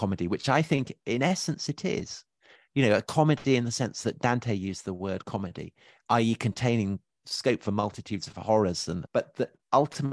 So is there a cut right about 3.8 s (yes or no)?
no